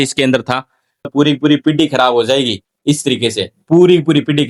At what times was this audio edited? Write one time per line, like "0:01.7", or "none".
0:01.0